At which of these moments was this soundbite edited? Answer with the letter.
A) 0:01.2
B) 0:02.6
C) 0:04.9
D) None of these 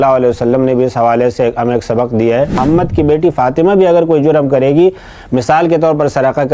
B